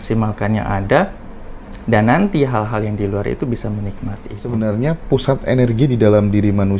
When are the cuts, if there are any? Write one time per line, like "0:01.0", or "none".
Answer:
0:04.4